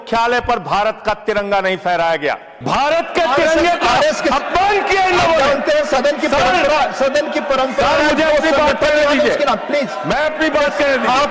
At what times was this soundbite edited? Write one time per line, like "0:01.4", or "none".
0:02.5